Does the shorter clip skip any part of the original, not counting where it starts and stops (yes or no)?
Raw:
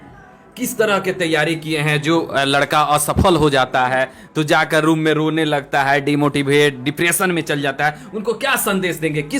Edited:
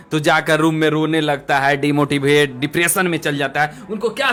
no